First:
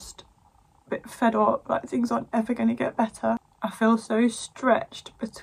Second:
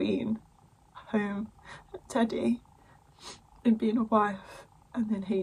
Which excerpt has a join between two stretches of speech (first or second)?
first